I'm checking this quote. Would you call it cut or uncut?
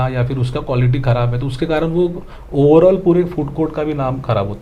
uncut